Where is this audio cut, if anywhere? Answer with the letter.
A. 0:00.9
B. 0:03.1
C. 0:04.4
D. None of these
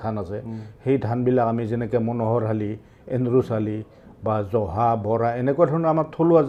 D